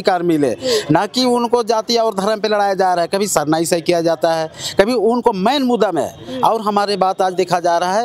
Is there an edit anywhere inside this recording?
no; 0 cuts

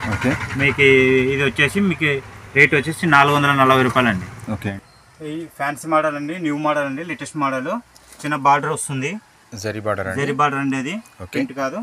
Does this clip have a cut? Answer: yes; 1 cut; at 4.7 s

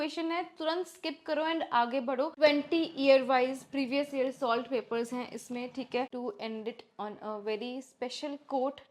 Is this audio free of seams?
no; 2 cuts; at 2.3 s, 6.1 s

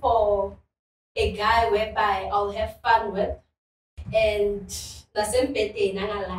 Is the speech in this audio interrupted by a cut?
no; 0 cuts

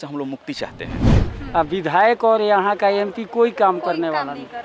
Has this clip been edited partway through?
yes; 1 cut; at 1.3 s

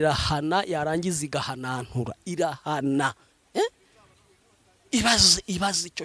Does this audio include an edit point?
no; 0 cuts

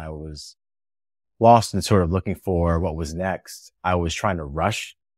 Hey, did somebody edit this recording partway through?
no; 0 cuts

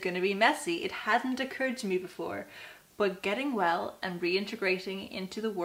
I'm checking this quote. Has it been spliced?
no; 0 cuts

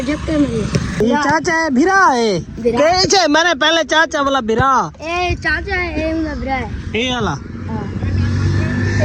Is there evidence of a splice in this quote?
yes; 1 cut; at 1.0 s

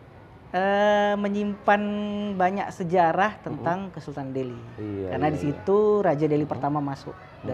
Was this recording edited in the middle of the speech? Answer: no; 0 cuts

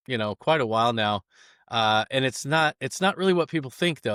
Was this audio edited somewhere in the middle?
no; 0 cuts

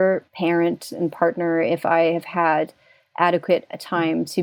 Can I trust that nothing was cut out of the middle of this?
yes; 0 cuts

